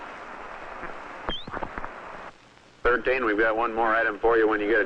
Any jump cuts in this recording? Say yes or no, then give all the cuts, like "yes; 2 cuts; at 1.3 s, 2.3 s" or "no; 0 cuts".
no; 0 cuts